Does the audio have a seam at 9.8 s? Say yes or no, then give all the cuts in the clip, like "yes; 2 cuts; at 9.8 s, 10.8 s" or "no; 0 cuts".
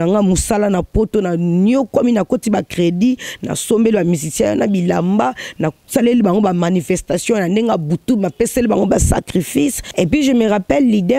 yes; 1 cut; at 9.8 s